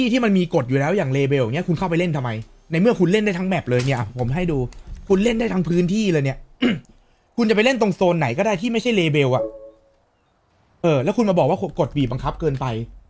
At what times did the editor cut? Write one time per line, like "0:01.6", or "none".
none